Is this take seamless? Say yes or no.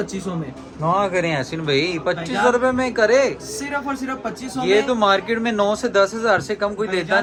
yes